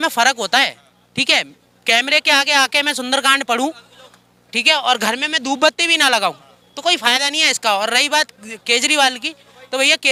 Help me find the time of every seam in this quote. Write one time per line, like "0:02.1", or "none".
none